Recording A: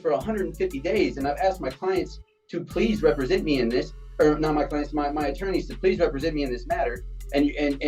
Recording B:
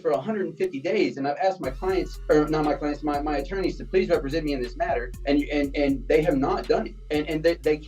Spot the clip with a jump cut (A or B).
B